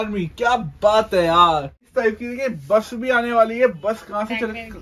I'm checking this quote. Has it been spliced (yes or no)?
yes